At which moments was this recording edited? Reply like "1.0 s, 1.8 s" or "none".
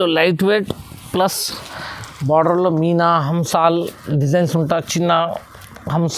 none